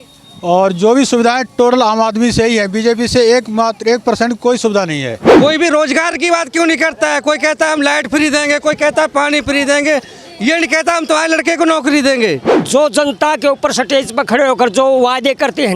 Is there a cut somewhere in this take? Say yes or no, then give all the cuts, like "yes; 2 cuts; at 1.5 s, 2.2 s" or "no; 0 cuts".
yes; 2 cuts; at 5.2 s, 12.5 s